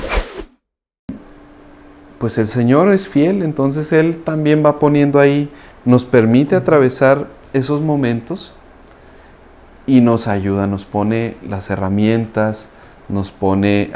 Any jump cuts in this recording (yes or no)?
yes